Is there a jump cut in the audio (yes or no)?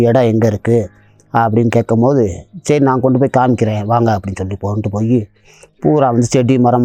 no